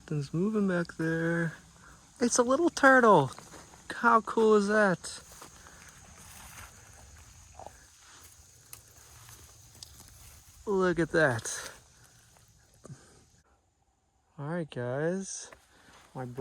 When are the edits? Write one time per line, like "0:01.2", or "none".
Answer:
0:13.7